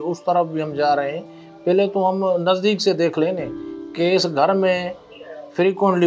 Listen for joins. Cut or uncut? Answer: uncut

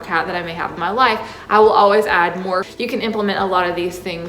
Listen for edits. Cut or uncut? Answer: cut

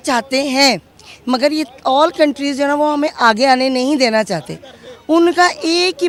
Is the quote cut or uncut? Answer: uncut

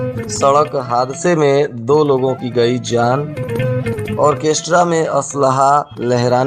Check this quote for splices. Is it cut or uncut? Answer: uncut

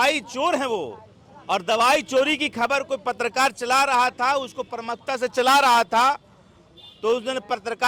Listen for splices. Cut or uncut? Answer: uncut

